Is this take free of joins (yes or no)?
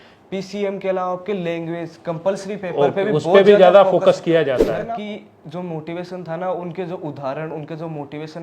no